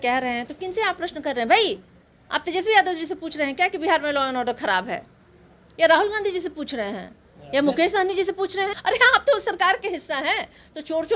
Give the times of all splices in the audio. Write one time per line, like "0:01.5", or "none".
0:08.7